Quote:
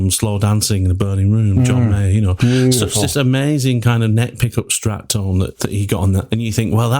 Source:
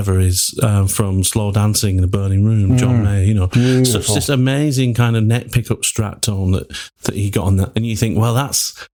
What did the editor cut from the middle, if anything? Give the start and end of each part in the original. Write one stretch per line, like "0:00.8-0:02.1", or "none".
0:06.7-0:07.0